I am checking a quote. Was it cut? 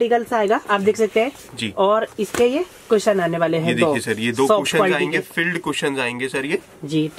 no; 0 cuts

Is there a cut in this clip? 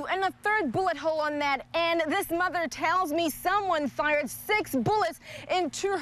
no; 0 cuts

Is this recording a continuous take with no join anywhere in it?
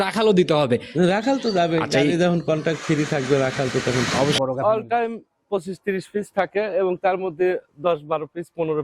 no; 1 cut; at 4.4 s

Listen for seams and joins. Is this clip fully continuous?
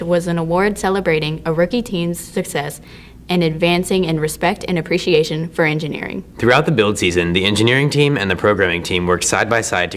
yes; 0 cuts

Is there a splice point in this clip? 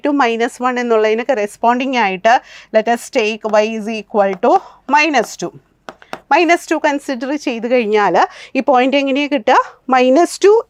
no; 0 cuts

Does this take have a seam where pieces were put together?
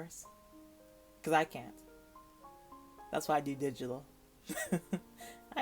no; 0 cuts

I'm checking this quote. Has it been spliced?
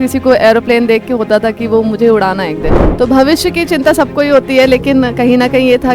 yes; 1 cut; at 2.8 s

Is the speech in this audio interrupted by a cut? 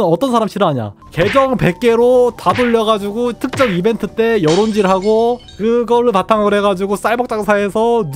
no; 0 cuts

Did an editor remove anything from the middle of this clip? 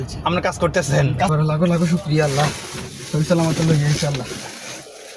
yes; 1 cut; at 1.3 s

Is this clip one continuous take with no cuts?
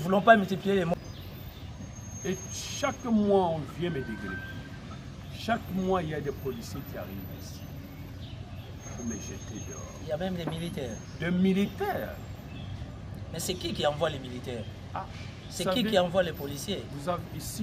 no; 1 cut; at 0.9 s

